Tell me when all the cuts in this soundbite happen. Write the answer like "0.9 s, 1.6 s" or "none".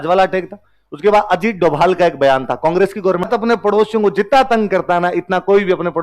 3.3 s